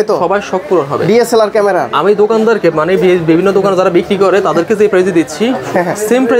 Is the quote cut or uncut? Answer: uncut